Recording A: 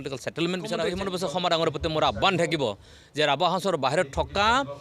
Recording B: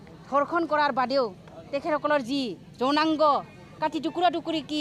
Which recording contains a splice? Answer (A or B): A